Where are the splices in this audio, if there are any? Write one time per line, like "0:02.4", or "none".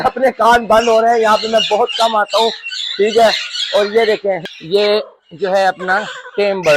0:04.5

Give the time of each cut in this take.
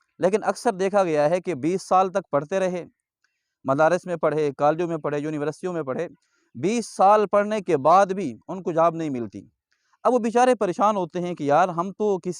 none

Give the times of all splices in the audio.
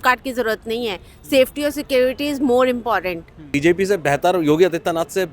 0:03.5

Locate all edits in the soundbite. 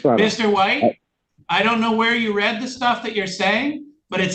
none

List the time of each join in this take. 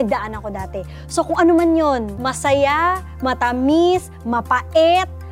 0:02.2

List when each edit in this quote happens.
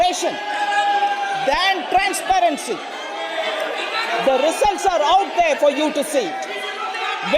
none

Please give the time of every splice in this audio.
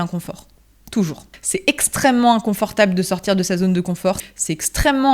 0:01.3
0:04.2

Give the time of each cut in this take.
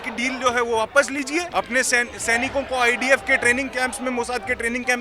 0:01.5

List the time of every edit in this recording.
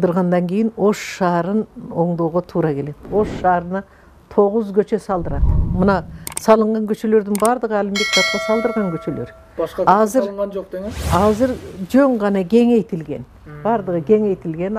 none

